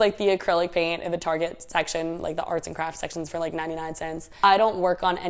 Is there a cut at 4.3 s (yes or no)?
yes